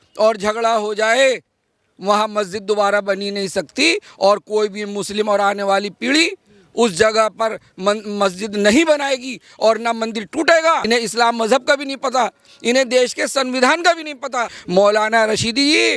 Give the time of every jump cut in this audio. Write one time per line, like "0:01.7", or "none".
0:10.8
0:14.6

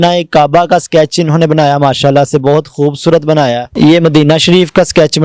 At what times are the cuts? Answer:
0:03.7

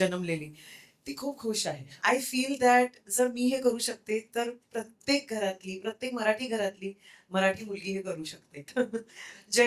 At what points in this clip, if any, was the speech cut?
0:01.9
0:08.7

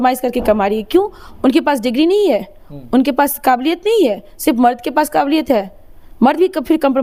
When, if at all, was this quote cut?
none

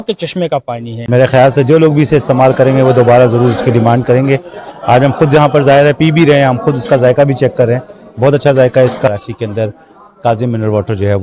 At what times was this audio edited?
0:01.0
0:09.1

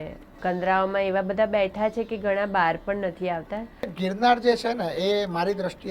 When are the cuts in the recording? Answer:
0:03.9

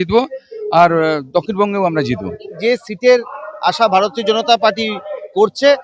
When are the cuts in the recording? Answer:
0:02.5

